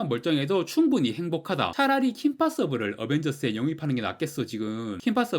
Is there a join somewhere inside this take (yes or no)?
yes